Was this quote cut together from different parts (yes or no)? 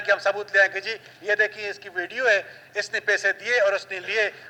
no